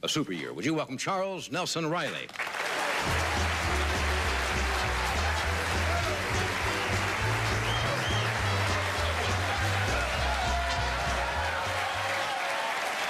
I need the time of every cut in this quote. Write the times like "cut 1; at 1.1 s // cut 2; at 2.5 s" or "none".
cut 1; at 1.3 s